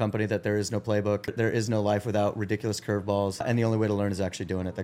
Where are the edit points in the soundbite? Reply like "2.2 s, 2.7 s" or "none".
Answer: 1.3 s, 3.5 s